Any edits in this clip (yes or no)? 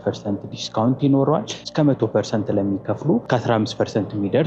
yes